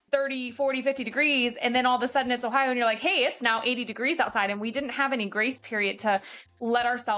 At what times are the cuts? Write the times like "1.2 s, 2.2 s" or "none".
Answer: none